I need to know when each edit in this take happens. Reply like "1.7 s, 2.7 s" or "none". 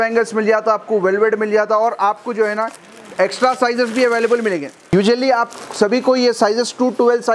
none

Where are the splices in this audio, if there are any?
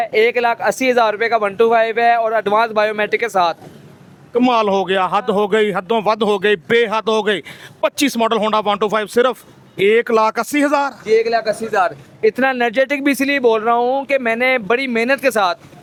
none

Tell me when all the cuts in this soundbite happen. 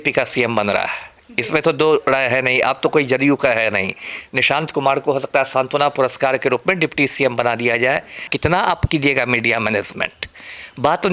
8.3 s

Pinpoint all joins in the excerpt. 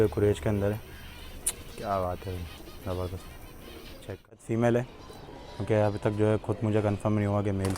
4.4 s

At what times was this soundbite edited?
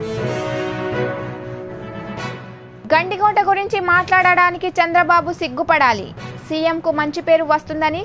2.1 s

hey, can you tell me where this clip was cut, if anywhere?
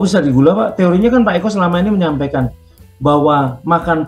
none

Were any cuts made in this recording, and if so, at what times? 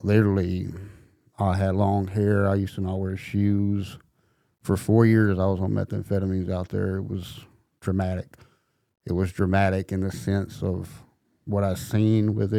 none

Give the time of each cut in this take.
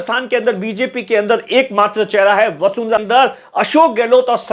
3.0 s

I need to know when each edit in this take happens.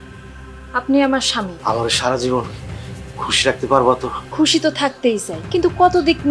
1.5 s, 4.2 s, 5.3 s

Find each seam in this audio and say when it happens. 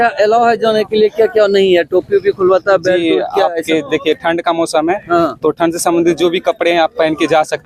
none

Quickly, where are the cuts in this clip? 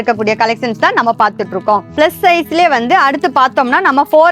1.9 s

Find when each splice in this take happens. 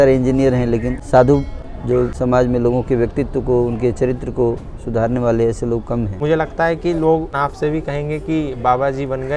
1.0 s, 2.1 s, 6.2 s, 7.3 s

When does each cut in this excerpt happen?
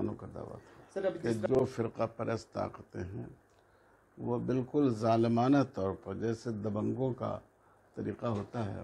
1.5 s

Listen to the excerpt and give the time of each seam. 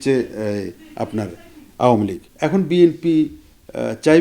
2.2 s

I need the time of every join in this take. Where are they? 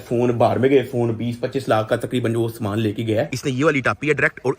3.3 s

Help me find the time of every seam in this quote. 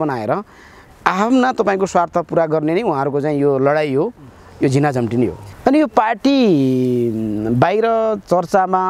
5.5 s

